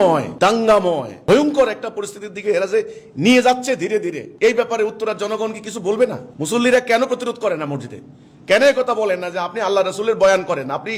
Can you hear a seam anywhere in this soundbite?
no; 0 cuts

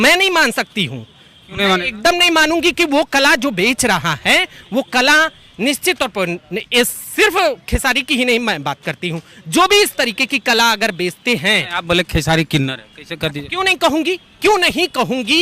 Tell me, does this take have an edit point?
no; 0 cuts

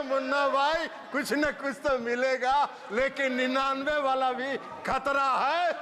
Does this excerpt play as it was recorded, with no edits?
yes; 0 cuts

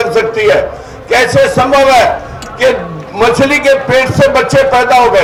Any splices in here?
no; 0 cuts

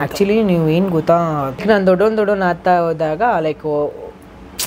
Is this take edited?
yes; 1 cut; at 1.6 s

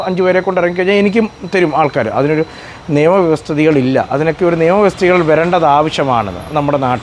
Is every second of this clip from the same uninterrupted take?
yes; 0 cuts

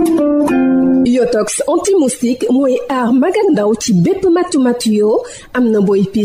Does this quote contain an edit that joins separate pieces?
yes; 1 cut; at 0.9 s

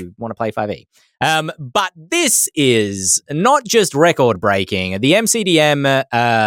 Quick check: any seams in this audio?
no; 0 cuts

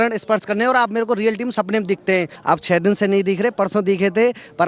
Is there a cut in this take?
yes; 1 cut; at 2.3 s

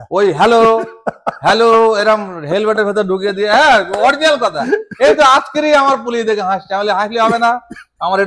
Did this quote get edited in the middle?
no; 0 cuts

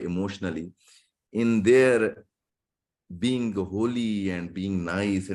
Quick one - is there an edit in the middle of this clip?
no; 0 cuts

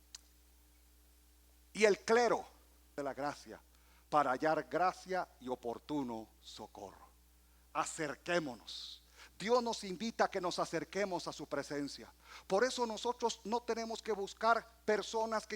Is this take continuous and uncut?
no; 1 cut; at 3.0 s

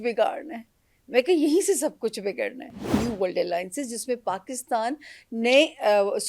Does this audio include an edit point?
yes; 1 cut; at 2.8 s

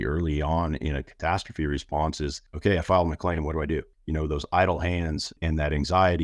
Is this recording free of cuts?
no; 3 cuts; at 2.5 s, 4.0 s, 5.3 s

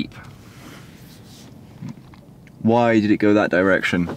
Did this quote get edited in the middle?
no; 0 cuts

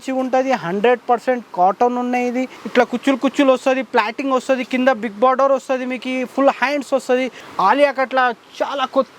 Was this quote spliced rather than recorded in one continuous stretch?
yes; 2 cuts; at 2.6 s, 7.4 s

